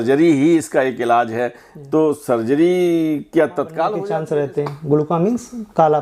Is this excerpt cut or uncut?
cut